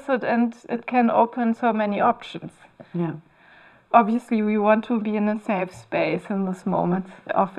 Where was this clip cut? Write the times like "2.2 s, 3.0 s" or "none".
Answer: none